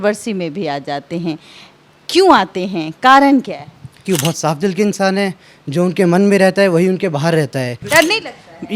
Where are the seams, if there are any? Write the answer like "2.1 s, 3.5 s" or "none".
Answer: 4.0 s, 7.8 s

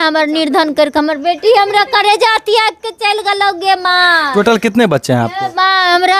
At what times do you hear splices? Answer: none

